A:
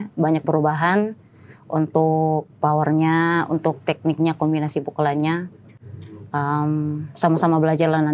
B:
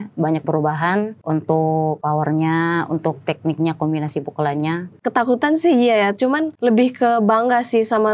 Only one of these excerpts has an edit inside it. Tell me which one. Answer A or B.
B